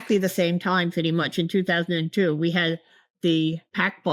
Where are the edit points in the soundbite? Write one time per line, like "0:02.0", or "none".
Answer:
none